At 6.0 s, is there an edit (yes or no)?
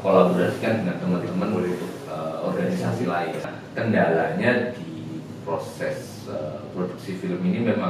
no